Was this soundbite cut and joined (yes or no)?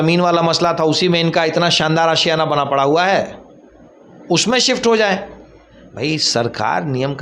no